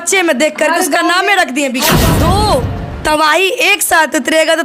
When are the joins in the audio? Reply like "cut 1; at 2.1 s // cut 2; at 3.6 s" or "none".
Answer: cut 1; at 2.0 s